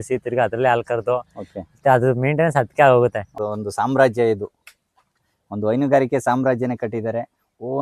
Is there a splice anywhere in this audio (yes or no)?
yes